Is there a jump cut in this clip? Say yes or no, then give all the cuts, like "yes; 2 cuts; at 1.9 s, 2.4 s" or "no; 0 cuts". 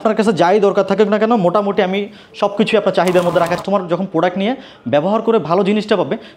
yes; 1 cut; at 3.6 s